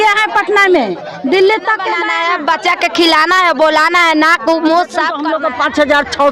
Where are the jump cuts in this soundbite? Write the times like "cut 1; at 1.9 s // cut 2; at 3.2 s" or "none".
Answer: cut 1; at 2.1 s // cut 2; at 5.2 s